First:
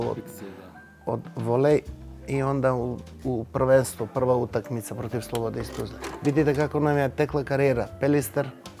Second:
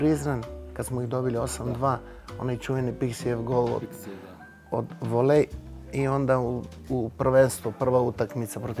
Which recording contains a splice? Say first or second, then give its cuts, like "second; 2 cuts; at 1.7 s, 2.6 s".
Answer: first; 1 cut; at 6.1 s